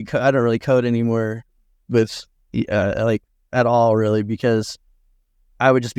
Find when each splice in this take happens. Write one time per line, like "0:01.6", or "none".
none

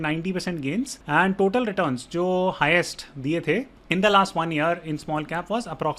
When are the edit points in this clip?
0:01.0
0:03.8

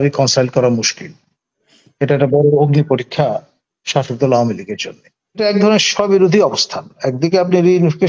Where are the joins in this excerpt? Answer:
0:05.4

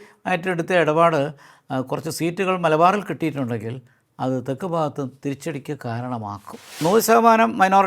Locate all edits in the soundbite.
0:06.8

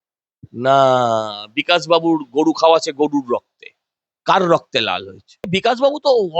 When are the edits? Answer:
0:05.5

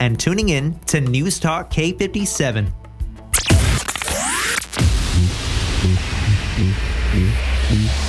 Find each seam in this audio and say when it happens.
0:03.0

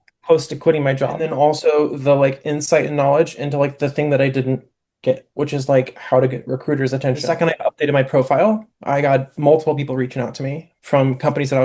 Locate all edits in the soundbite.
0:01.2
0:07.2

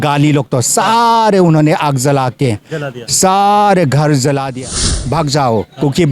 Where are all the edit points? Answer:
0:04.9

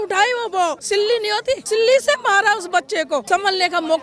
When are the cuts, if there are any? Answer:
0:01.1
0:03.2

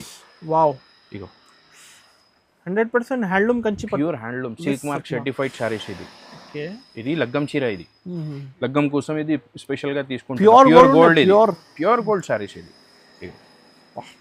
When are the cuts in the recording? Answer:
none

